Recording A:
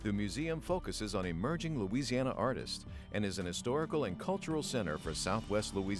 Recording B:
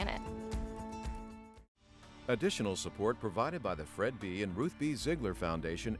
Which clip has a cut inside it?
B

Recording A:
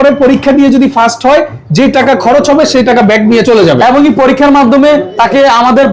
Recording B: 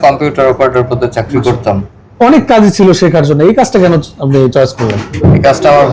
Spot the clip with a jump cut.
B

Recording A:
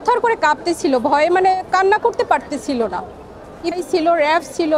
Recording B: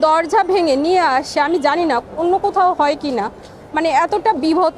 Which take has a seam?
A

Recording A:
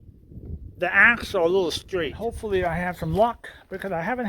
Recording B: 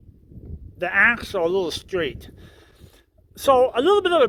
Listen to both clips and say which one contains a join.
A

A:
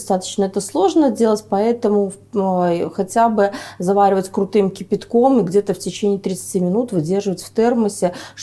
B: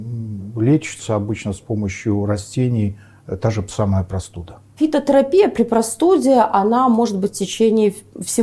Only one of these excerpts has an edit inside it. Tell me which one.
B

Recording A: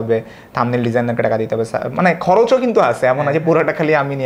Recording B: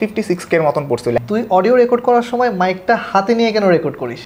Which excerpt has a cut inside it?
B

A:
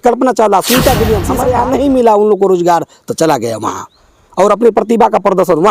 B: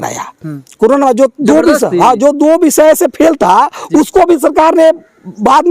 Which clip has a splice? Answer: A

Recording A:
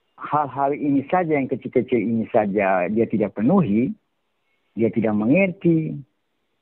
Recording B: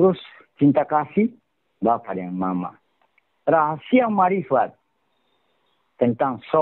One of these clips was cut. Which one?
B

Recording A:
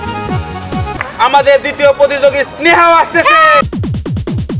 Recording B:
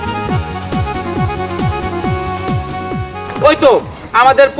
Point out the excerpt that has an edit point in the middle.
A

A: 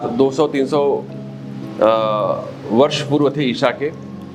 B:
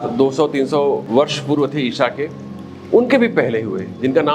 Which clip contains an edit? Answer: B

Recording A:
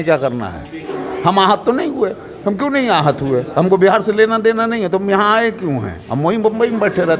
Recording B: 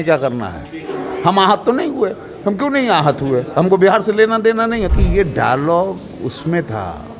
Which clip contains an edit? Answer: B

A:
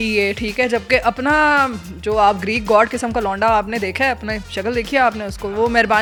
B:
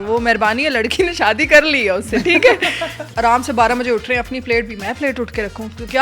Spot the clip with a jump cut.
B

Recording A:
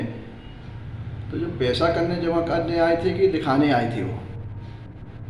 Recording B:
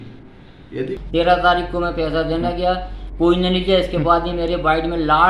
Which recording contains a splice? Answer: B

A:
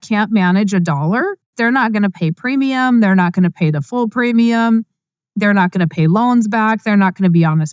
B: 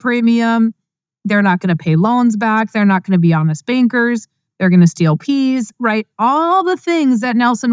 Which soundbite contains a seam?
A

